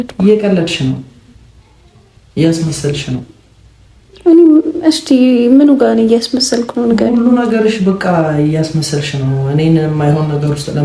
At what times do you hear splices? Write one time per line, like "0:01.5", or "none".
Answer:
none